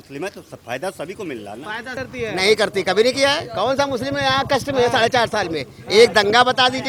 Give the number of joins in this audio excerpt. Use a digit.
1